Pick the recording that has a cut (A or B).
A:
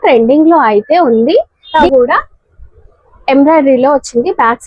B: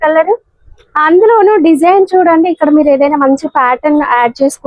A